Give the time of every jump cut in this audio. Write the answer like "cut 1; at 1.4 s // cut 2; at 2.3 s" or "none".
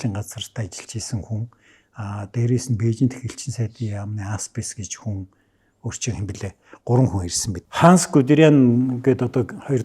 cut 1; at 7.6 s